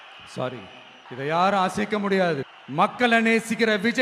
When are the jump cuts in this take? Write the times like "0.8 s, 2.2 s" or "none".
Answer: none

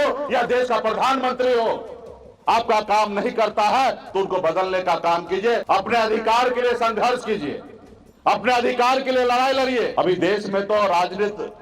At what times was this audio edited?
5.6 s, 9.9 s

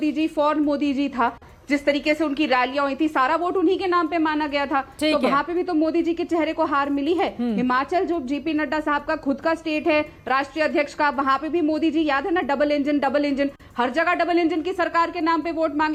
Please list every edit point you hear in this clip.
none

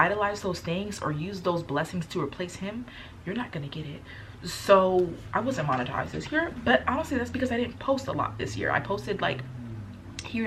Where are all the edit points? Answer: none

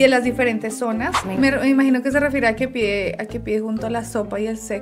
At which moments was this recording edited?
1.1 s

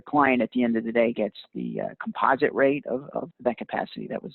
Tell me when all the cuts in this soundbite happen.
3.3 s

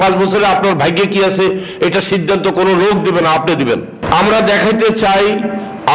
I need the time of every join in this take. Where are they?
4.0 s

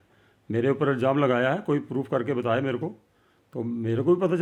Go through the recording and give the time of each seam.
none

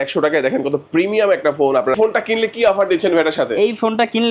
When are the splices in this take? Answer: 2.0 s

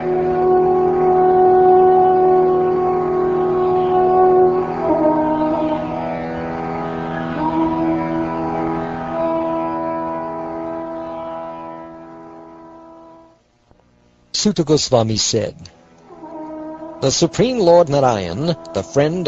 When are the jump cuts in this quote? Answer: 9.9 s

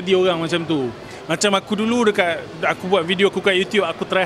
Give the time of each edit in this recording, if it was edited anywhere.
none

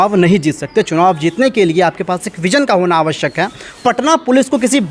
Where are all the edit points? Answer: 3.6 s

